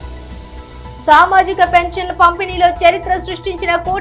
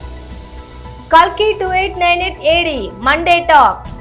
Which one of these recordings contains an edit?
first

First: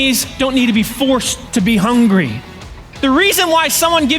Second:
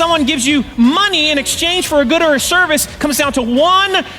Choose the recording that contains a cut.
first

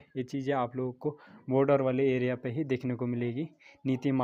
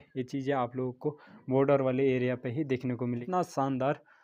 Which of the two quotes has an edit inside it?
second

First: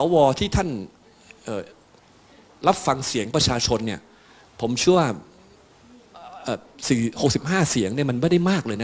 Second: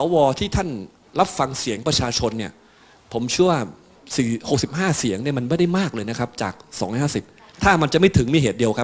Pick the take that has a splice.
second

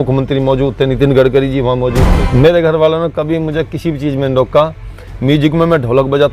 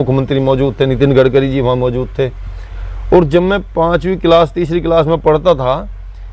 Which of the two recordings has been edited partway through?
first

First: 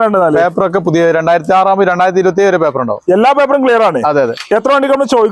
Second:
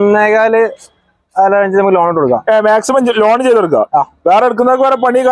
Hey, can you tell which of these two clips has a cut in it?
first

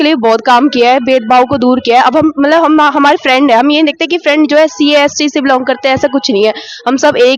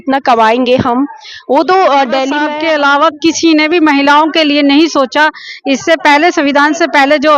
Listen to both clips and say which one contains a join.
second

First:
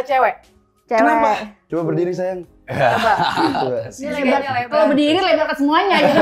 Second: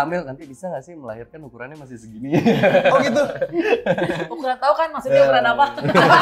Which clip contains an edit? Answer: first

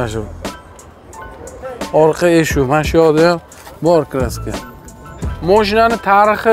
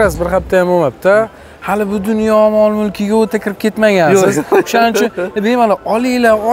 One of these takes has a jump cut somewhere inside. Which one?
first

